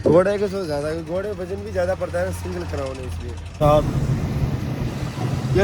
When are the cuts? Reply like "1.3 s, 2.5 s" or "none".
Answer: 3.6 s

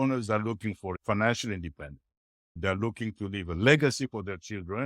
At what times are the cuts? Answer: 1.0 s

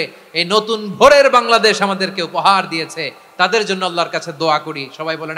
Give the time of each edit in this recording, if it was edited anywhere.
none

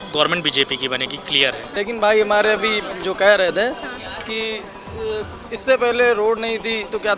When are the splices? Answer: 1.7 s

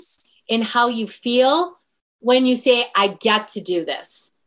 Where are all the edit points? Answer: none

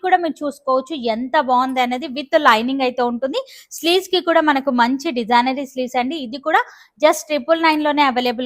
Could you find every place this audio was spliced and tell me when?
none

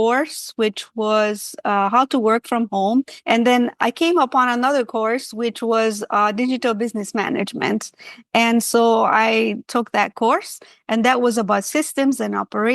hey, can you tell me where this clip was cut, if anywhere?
3.1 s

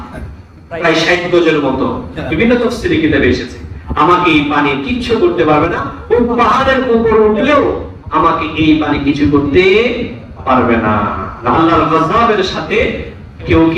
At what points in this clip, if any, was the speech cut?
11.5 s

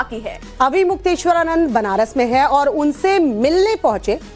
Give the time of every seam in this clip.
2.3 s

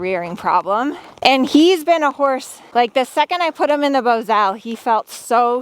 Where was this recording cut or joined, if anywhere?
1.2 s, 2.5 s

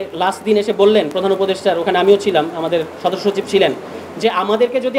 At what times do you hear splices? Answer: none

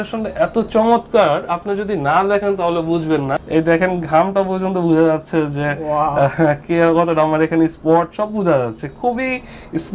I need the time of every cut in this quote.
none

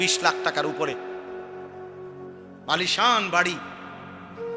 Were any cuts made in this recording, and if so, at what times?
3.7 s

